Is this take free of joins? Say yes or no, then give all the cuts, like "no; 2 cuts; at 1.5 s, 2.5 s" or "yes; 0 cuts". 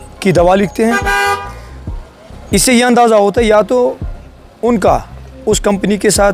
yes; 0 cuts